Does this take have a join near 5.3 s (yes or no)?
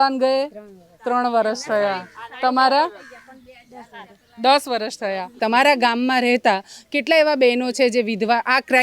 yes